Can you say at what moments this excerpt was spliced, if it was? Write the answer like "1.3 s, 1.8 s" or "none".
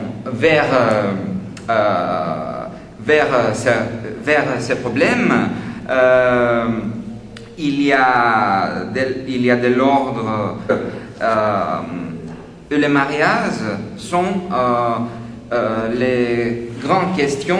none